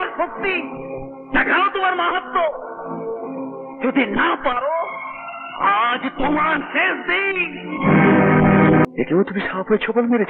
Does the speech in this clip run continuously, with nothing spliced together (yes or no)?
no